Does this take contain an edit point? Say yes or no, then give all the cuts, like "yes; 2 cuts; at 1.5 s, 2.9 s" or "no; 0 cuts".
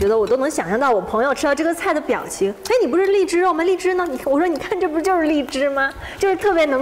no; 0 cuts